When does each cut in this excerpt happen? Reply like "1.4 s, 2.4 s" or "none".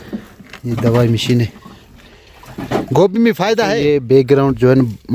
3.9 s